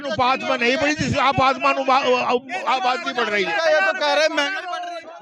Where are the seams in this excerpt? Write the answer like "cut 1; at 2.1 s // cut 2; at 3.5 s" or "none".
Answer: cut 1; at 3.5 s

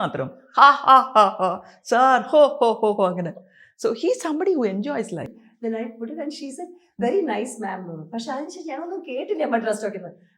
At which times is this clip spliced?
cut 1; at 5.3 s

